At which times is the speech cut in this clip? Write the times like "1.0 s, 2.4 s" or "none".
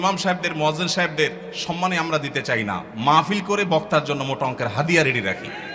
none